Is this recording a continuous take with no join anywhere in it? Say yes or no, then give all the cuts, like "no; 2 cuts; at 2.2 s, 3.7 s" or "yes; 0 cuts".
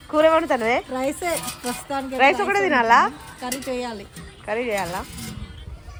yes; 0 cuts